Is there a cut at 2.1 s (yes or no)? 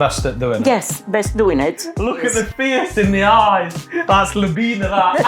yes